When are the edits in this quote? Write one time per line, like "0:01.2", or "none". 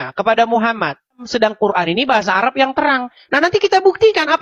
0:01.3